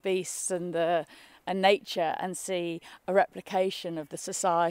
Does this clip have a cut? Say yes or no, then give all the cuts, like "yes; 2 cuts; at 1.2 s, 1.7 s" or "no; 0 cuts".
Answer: no; 0 cuts